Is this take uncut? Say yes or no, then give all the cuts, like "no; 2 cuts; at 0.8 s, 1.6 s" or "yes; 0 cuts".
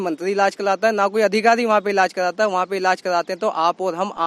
yes; 0 cuts